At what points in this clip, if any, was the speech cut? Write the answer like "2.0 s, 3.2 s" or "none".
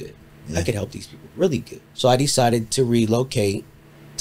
1.8 s